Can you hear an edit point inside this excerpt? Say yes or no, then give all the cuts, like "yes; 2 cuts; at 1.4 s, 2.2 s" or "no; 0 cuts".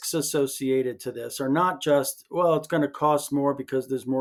no; 0 cuts